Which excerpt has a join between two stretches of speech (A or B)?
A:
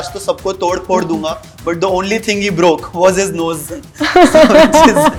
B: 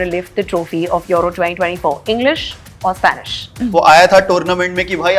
B